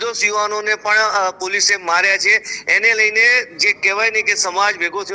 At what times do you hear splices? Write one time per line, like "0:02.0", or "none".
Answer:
none